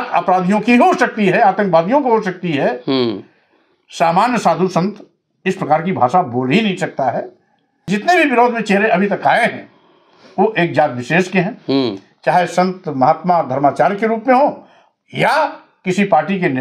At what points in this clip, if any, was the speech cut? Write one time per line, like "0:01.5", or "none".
0:07.9